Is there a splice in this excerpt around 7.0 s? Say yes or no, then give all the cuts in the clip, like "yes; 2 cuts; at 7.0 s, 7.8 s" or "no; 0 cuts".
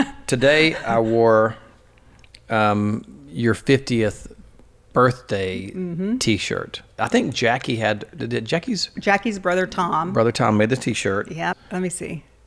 yes; 2 cuts; at 7.0 s, 11.6 s